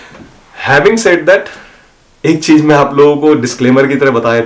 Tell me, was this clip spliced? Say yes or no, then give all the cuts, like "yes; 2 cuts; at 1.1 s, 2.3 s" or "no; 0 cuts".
no; 0 cuts